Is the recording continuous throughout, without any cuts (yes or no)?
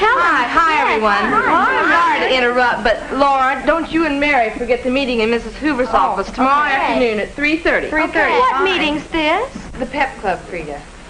yes